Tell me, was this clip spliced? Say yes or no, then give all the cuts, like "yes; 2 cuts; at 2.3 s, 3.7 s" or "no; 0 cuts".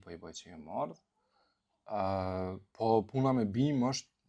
no; 0 cuts